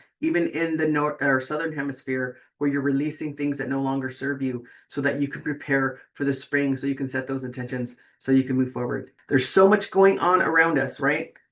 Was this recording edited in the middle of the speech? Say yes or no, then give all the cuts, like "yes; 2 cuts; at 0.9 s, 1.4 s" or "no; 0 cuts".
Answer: yes; 1 cut; at 9.1 s